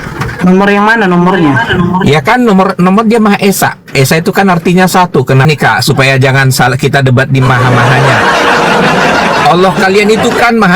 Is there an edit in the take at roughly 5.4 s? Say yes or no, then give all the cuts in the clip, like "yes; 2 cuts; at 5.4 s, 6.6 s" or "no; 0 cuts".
yes; 1 cut; at 5.4 s